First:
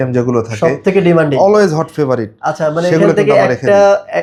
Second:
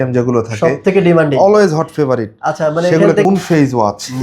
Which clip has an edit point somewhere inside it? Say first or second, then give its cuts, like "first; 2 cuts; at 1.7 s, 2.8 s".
second; 1 cut; at 3.3 s